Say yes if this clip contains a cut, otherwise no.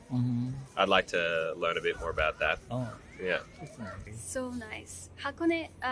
yes